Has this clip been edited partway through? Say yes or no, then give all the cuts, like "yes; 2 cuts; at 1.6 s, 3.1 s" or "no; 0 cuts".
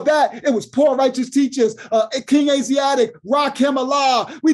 no; 0 cuts